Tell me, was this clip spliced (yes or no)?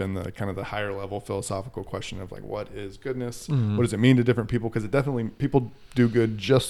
no